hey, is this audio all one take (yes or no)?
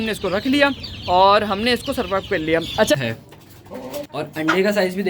no